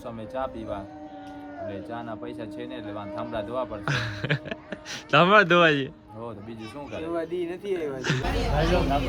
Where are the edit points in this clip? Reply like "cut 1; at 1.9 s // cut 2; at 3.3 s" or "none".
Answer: cut 1; at 8.2 s